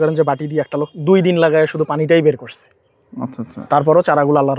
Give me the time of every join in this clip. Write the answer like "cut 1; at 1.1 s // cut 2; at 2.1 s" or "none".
none